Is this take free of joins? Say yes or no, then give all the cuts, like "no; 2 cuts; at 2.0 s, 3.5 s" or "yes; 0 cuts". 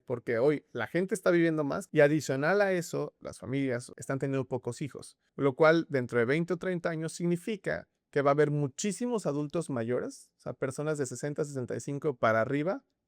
no; 3 cuts; at 1.8 s, 3.2 s, 3.9 s